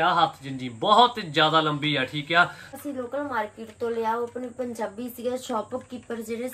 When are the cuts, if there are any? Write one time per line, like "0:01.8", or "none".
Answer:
0:02.8

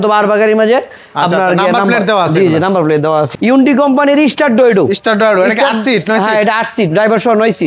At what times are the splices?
0:03.4

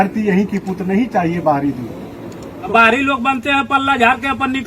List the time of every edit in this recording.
0:02.7

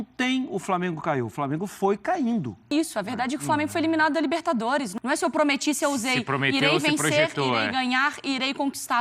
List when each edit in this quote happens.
0:02.7
0:04.9

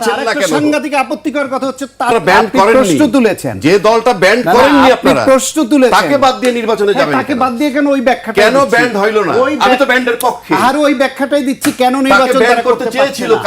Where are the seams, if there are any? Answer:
0:02.1

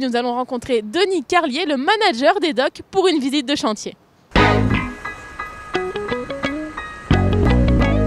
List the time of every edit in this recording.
none

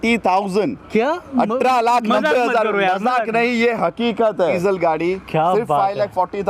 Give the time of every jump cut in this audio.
0:04.6

